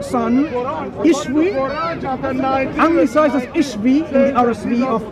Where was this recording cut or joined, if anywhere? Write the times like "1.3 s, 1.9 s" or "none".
none